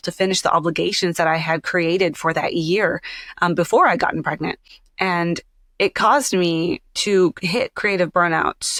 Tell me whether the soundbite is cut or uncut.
uncut